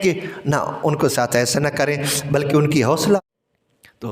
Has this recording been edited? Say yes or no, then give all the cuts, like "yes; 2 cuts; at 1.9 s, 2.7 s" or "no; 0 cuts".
yes; 1 cut; at 3.2 s